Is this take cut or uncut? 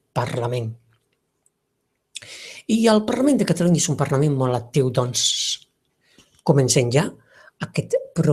uncut